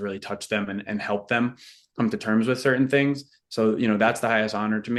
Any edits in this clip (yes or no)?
no